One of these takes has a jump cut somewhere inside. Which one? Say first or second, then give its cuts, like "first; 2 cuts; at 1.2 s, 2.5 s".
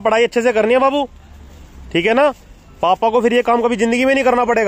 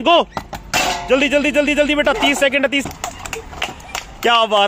second; 1 cut; at 2.8 s